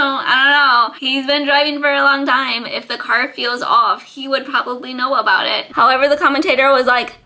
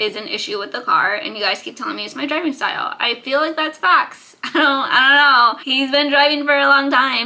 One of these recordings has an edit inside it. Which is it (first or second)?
first